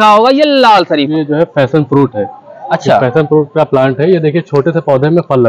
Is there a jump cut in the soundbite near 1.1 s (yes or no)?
yes